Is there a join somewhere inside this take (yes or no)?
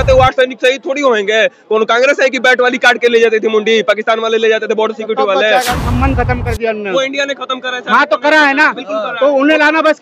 yes